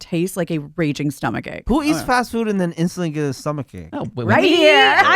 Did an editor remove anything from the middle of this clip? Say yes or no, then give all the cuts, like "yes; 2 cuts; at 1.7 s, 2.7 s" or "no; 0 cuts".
yes; 1 cut; at 1.6 s